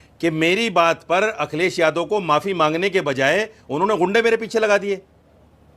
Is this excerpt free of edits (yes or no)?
yes